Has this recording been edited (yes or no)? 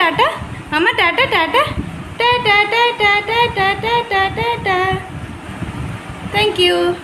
no